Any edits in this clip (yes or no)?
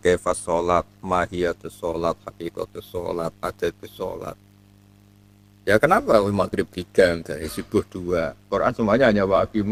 no